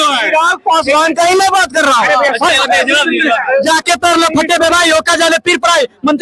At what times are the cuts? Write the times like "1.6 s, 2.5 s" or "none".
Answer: 2.4 s